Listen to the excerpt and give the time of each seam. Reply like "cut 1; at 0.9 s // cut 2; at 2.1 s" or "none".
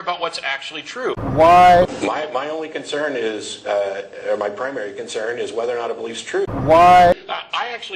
none

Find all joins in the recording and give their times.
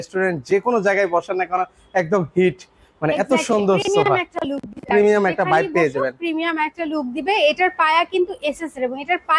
none

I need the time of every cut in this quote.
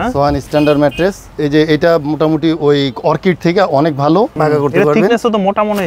cut 1; at 1.3 s // cut 2; at 4.3 s

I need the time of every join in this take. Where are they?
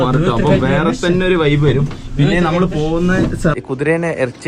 cut 1; at 3.5 s

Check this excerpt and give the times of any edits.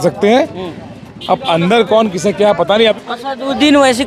cut 1; at 2.9 s

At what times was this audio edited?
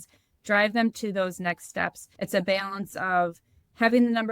cut 1; at 2.0 s

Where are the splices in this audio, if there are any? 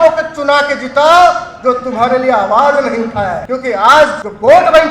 cut 1; at 3.9 s

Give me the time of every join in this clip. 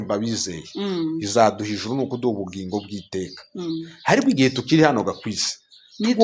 none

